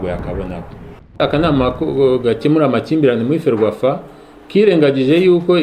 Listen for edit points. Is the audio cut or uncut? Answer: cut